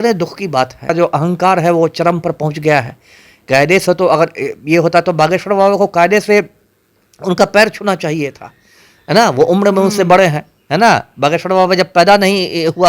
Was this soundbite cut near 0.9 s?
yes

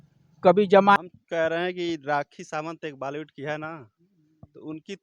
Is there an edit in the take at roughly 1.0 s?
yes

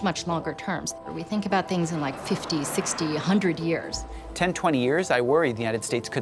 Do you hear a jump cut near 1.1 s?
yes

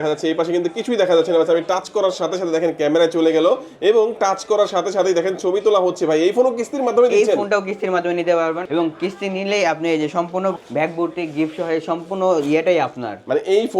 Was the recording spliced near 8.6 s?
yes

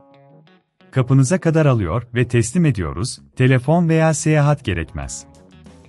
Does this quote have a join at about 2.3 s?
no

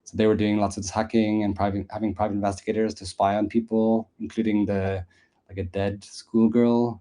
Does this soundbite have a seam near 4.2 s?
no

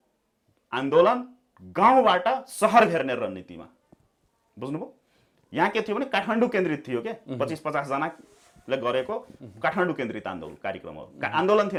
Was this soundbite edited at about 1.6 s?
no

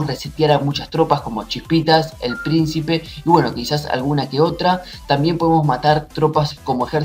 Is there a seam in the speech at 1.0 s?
no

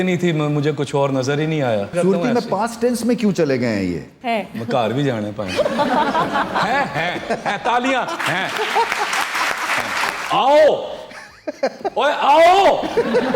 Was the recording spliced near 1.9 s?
yes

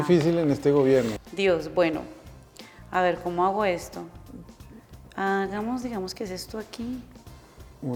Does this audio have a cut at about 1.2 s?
no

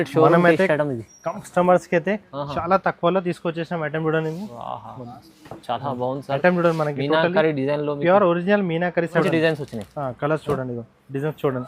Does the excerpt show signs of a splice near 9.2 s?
yes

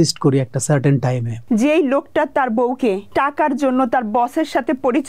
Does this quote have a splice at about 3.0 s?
yes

